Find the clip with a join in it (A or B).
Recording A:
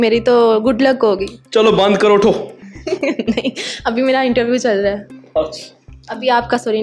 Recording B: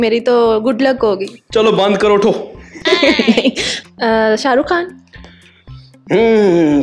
B